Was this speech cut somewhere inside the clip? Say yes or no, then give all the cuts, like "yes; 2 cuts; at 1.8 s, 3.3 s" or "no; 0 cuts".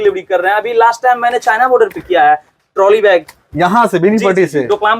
no; 0 cuts